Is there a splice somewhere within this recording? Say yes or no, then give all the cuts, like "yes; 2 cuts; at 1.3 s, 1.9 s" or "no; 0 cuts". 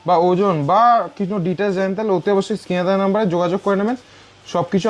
no; 0 cuts